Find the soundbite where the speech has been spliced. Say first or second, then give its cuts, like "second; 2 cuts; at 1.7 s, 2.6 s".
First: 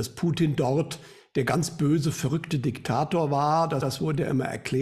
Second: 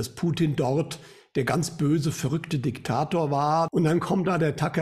second; 1 cut; at 3.7 s